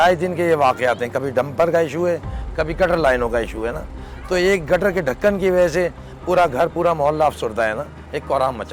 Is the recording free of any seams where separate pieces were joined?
yes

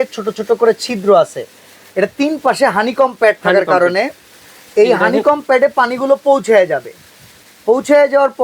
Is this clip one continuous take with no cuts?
yes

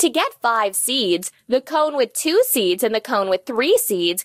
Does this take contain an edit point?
no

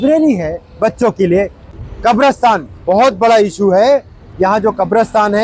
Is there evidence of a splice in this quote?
yes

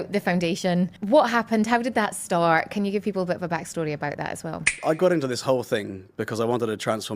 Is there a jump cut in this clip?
yes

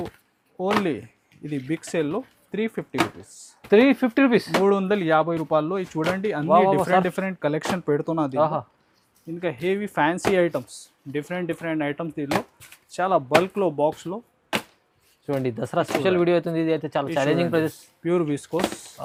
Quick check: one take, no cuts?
yes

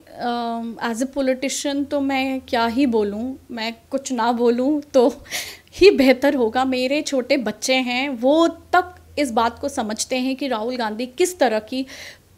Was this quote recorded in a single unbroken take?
yes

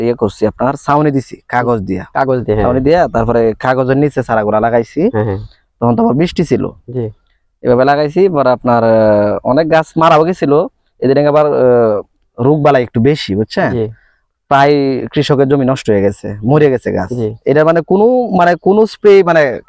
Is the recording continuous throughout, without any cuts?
yes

